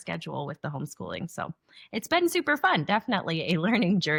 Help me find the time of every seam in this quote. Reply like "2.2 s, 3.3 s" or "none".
none